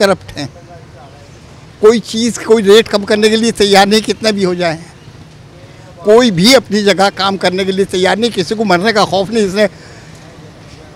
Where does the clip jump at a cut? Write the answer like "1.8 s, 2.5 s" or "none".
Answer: none